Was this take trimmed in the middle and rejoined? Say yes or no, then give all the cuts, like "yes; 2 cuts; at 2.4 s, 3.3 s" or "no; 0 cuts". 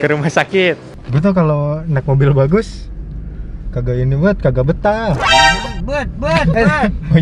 yes; 1 cut; at 0.9 s